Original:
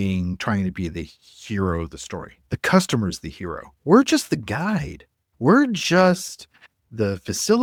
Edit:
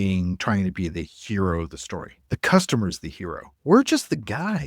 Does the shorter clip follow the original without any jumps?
no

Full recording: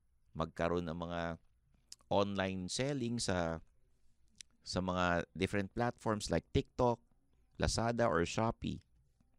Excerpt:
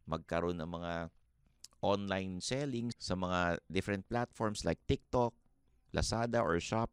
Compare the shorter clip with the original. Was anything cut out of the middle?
yes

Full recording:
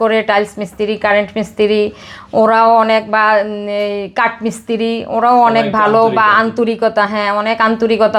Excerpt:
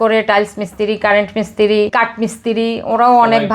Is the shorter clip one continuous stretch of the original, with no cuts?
no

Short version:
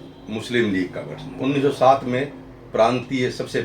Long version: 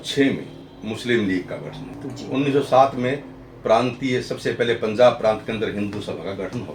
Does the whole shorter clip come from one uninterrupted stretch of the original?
no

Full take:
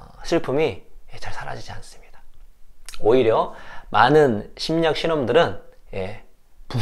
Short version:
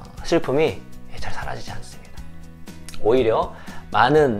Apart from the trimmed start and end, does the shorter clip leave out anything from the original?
no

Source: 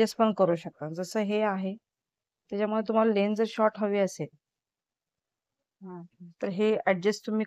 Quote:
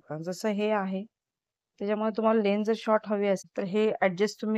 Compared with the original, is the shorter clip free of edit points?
no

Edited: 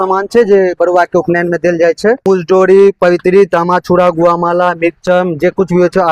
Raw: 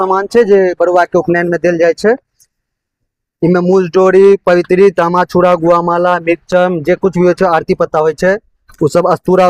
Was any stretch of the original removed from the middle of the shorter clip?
yes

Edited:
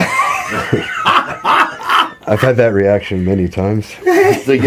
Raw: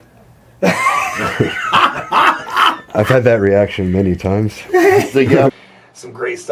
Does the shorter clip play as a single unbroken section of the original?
yes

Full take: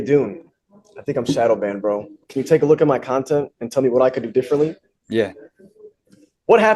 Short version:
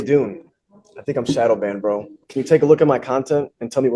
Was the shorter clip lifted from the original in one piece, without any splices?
yes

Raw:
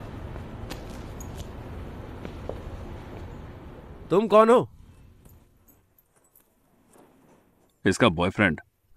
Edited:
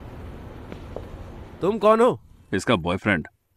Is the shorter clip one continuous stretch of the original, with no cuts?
no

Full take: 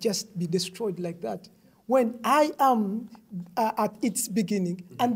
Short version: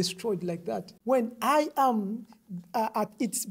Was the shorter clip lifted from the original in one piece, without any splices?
no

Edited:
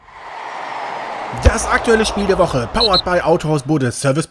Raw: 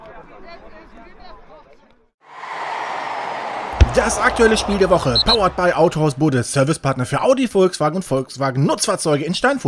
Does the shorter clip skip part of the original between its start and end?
yes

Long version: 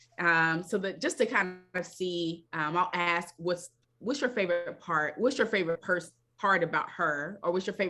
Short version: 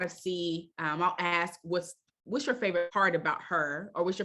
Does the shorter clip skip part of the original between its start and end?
yes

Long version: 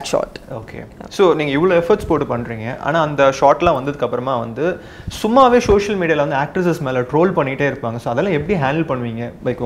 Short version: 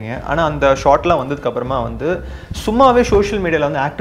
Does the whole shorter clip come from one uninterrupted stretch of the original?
yes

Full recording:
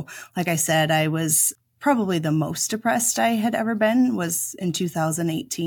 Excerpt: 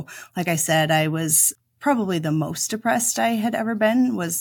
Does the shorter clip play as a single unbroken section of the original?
yes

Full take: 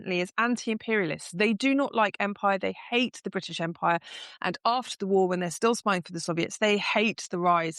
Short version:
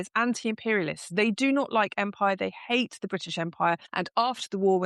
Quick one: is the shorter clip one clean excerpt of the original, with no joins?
no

